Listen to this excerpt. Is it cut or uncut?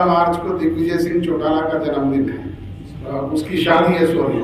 uncut